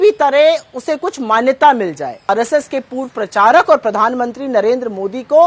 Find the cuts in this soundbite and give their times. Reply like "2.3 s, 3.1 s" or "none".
2.3 s

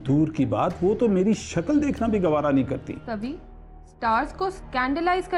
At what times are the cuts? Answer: 3.0 s

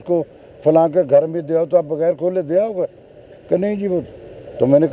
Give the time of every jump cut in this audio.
none

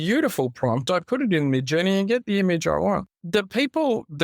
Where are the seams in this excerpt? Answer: 3.1 s

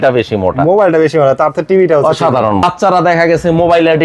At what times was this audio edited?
2.6 s

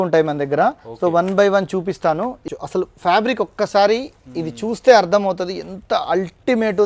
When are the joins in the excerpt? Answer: 2.5 s

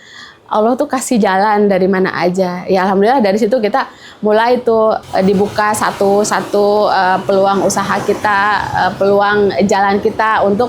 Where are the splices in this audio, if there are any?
5.0 s

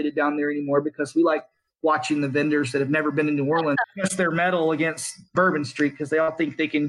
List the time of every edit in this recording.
3.8 s, 5.3 s

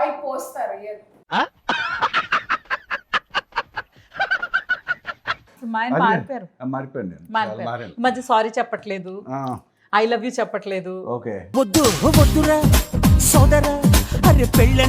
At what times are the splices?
5.6 s

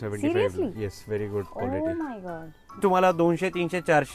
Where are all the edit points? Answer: 2.8 s

